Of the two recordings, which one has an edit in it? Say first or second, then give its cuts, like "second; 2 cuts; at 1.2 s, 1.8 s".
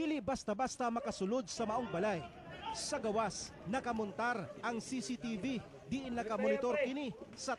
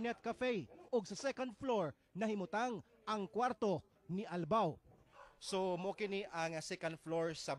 second; 1 cut; at 4.0 s